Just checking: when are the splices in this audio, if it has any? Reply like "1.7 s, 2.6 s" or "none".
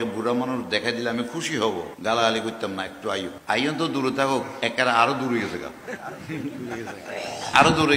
1.9 s, 3.3 s